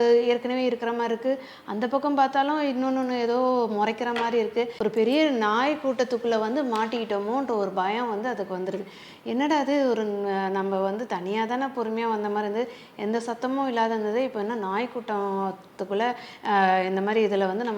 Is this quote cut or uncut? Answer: cut